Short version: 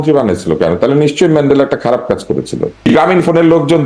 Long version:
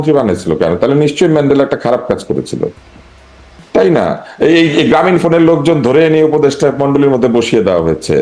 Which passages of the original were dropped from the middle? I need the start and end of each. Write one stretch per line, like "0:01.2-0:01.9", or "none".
0:02.9-0:04.8